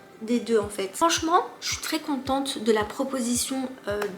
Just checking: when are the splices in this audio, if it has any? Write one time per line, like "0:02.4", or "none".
0:00.9

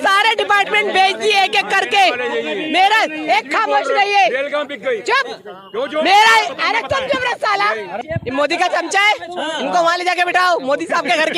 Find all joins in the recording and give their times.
0:08.0

